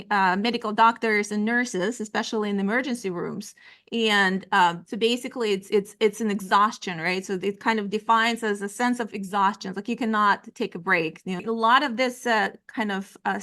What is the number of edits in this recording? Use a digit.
1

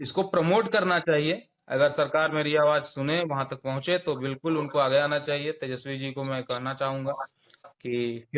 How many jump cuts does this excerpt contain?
0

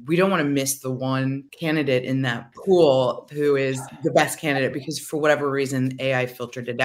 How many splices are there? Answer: 3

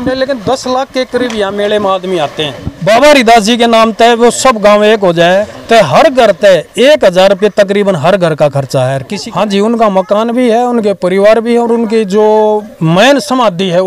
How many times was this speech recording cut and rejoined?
3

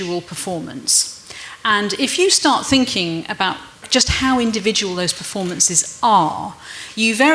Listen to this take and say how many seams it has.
1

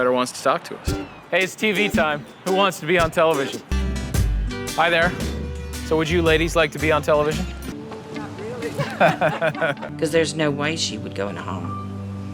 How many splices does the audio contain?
2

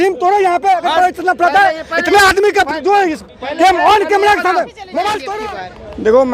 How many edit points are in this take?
1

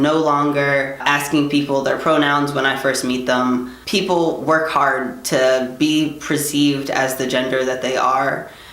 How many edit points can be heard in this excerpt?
2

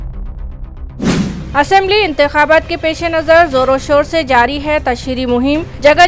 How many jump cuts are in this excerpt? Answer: 1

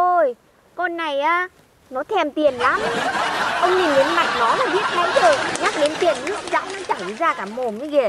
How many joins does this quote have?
0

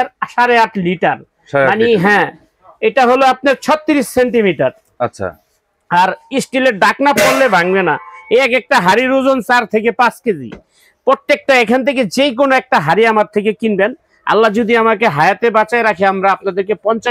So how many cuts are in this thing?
0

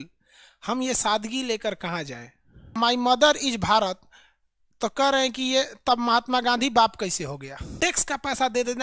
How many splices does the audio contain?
2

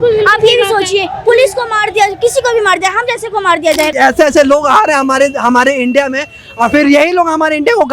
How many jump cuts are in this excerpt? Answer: 1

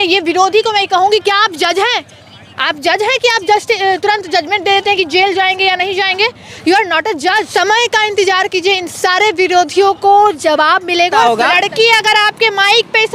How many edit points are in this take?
2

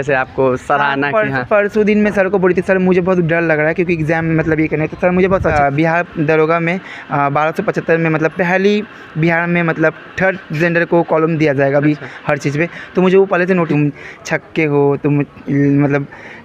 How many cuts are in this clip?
2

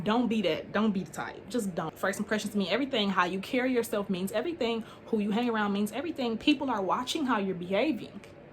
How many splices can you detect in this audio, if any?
1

